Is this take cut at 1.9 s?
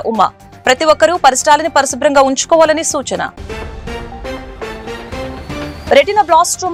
no; 0 cuts

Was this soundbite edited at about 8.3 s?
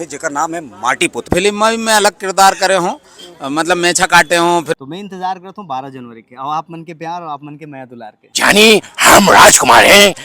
yes; 3 cuts; at 1.2 s, 4.8 s, 8.3 s

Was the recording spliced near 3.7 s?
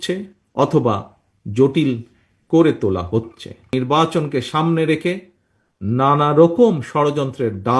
yes; 1 cut; at 3.7 s

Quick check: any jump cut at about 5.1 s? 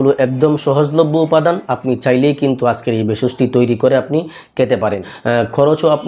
yes; 1 cut; at 5.1 s

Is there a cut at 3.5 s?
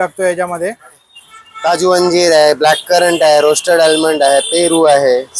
no; 1 cut; at 1.5 s

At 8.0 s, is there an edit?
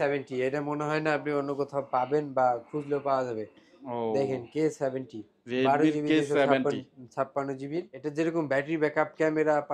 yes; 1 cut; at 8.0 s

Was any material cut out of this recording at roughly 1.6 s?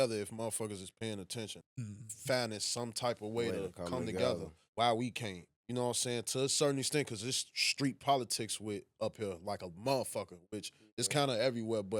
yes; 2 cuts; at 1.6 s, 4.6 s

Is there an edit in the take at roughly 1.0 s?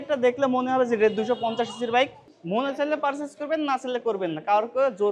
no; 1 cut; at 2.3 s

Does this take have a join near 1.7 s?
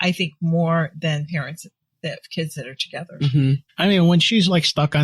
no; 1 cut; at 3.7 s

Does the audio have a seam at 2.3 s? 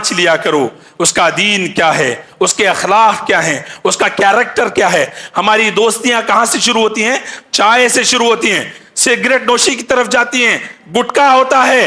no; 0 cuts

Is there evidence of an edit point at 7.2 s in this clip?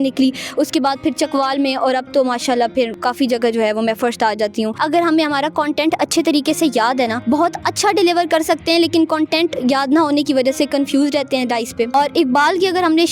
yes; 4 cuts; at 3.0 s, 4.8 s, 7.2 s, 11.9 s

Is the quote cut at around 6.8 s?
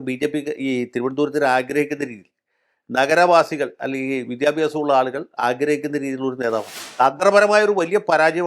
yes; 1 cut; at 6.8 s

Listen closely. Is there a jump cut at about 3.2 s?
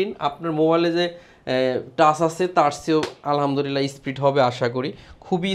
no; 0 cuts

